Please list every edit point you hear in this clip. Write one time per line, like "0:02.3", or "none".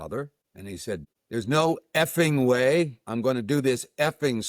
0:01.0